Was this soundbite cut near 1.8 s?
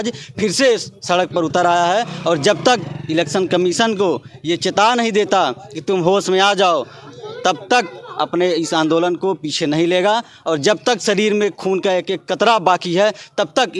no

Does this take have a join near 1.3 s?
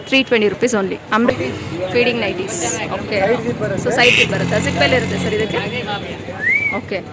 yes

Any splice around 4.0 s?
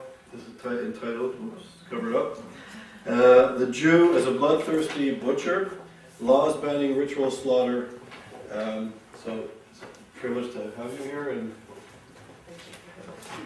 yes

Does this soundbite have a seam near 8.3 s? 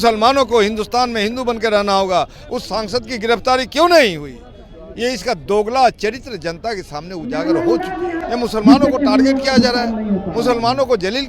yes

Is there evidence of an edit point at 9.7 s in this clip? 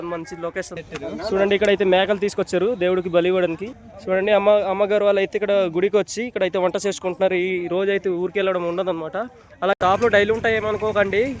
yes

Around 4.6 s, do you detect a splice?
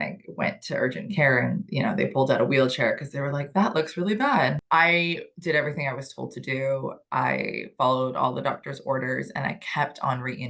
yes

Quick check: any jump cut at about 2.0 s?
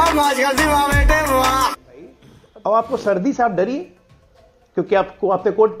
yes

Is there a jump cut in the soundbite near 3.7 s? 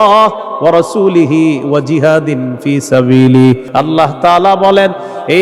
yes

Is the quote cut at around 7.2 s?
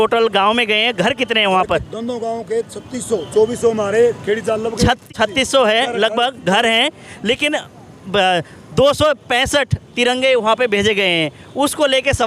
no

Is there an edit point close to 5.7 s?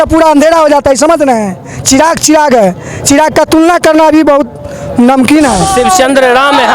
yes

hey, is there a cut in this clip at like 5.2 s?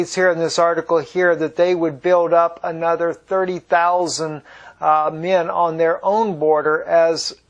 yes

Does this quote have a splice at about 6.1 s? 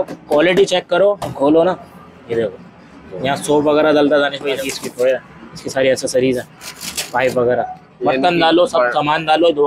no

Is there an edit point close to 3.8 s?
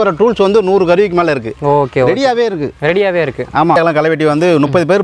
yes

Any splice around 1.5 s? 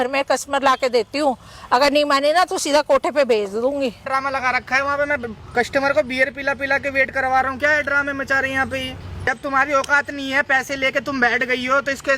no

